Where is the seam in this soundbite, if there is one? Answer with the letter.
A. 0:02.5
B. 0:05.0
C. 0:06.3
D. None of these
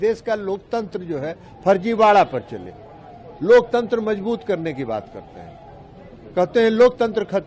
D